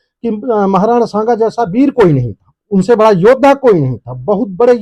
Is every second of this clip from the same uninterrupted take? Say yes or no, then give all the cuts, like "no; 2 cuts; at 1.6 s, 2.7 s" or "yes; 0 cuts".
yes; 0 cuts